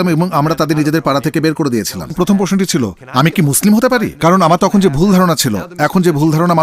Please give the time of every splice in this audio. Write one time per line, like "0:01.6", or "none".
0:02.1